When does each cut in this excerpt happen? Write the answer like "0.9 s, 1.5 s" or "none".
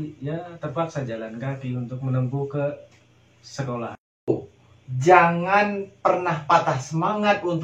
4.3 s